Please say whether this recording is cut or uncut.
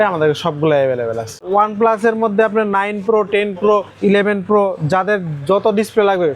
cut